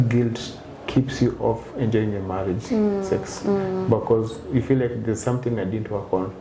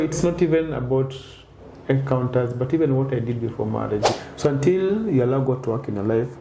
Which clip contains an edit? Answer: second; 1 cut; at 4.1 s

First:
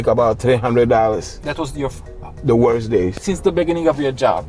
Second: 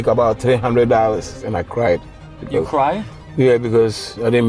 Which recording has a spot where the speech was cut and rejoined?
second; 1 cut; at 1.4 s

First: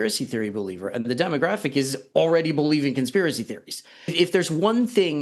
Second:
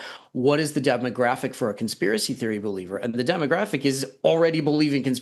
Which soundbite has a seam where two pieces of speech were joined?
first; 1 cut; at 4.1 s

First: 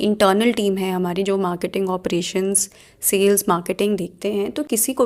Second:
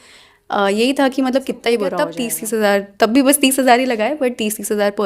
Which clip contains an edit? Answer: second; 1 cut; at 2.3 s

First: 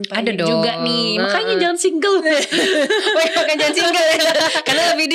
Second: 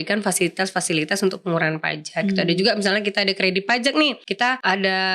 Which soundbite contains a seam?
second; 1 cut; at 4.2 s

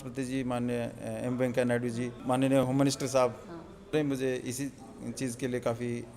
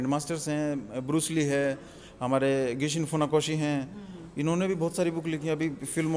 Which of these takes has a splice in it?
first; 2 cuts; at 2.2 s, 3.9 s

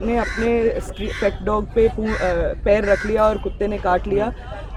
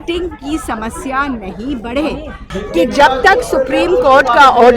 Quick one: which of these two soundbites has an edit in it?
second; 1 cut; at 2.4 s

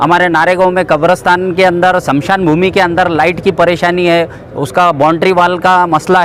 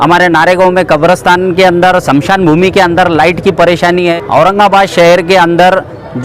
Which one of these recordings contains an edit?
second; 1 cut; at 4.1 s

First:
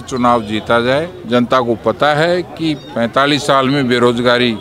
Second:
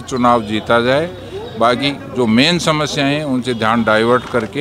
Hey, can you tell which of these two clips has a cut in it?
first; 1 cut; at 1.2 s

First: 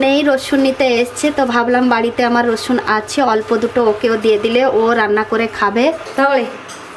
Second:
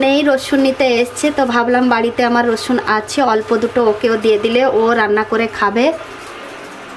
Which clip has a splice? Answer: first; 1 cut; at 6.0 s

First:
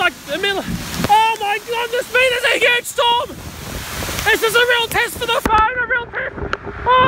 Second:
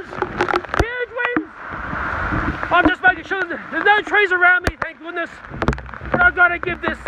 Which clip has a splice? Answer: second; 1 cut; at 5.4 s

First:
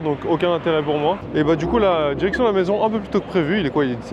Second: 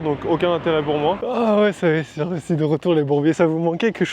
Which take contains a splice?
second; 1 cut; at 1.2 s

